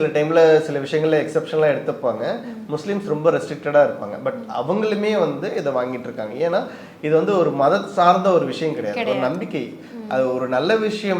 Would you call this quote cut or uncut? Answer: uncut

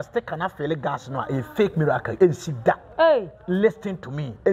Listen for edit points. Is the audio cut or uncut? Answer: cut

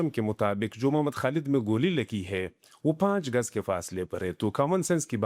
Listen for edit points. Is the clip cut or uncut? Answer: uncut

